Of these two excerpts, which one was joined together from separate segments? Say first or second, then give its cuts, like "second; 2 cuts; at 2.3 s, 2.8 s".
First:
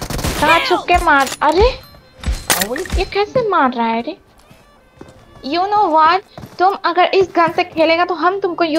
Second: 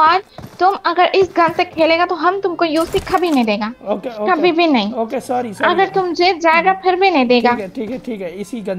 first; 1 cut; at 4.3 s